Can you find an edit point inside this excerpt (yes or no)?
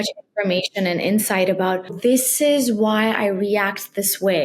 yes